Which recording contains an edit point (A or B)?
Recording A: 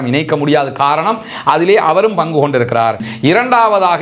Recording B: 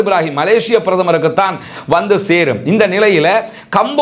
A